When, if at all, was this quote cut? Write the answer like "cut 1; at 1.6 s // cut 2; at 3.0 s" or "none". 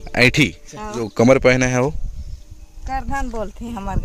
cut 1; at 1.1 s

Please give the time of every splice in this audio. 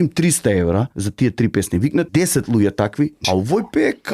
cut 1; at 1.0 s // cut 2; at 2.1 s // cut 3; at 3.2 s

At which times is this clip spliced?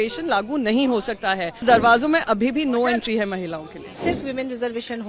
cut 1; at 1.6 s // cut 2; at 4.0 s

